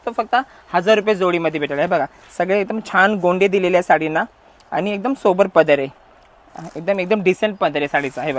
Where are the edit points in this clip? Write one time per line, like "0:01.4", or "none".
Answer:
none